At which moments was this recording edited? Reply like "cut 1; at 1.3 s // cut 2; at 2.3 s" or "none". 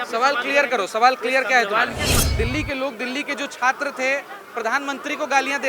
cut 1; at 2.1 s